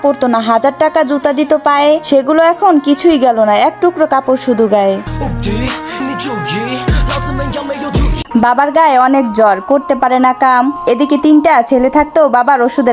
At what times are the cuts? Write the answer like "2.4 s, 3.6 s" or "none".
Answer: 8.3 s